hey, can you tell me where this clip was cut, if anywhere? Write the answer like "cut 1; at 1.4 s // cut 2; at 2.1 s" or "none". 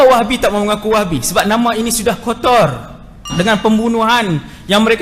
cut 1; at 3.2 s